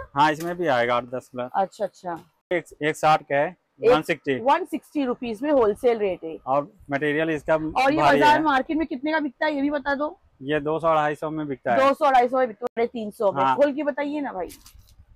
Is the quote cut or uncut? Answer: cut